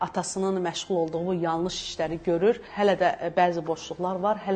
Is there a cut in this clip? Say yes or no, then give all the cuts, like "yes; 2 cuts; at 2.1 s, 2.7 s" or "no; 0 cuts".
yes; 1 cut; at 2.7 s